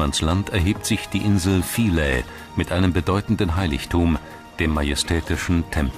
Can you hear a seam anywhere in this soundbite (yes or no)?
yes